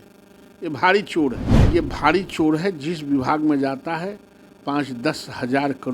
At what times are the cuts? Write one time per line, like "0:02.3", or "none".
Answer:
0:01.5